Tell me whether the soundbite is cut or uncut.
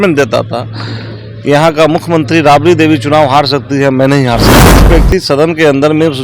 cut